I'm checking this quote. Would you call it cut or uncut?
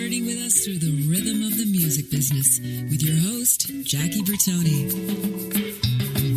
uncut